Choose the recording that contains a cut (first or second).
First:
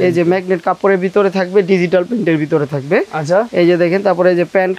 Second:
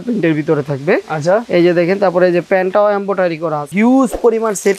second